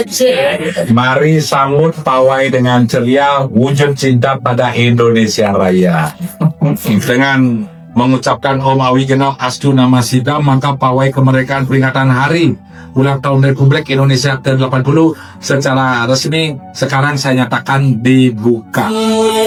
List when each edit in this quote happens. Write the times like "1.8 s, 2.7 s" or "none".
none